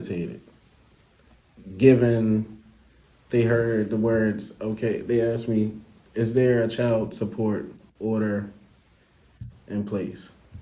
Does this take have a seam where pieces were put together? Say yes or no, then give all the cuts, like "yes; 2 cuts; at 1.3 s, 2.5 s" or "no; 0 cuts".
no; 0 cuts